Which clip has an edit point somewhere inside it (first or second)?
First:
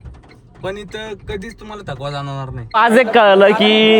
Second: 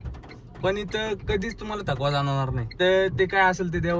first